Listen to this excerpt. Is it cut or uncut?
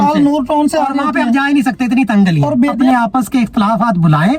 cut